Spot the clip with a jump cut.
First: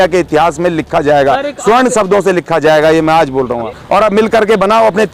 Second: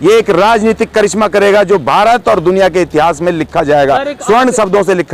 first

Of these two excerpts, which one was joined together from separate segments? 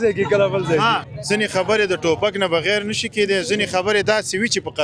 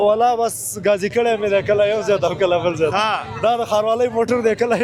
first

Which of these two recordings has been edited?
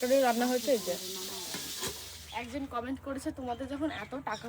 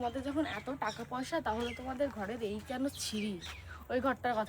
first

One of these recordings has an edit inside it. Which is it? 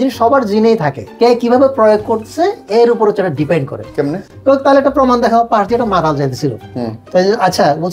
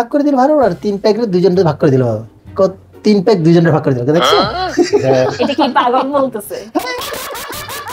first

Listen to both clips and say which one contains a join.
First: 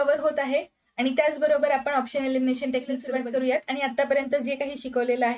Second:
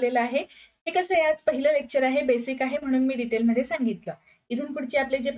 first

